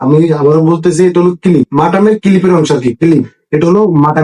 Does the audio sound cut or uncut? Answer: uncut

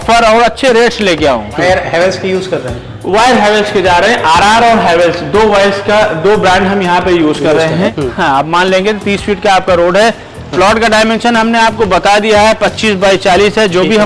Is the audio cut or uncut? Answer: cut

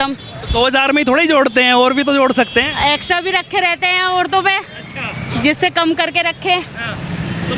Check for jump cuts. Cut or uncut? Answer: uncut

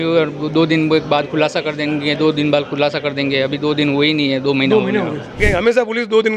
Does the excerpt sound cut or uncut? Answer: cut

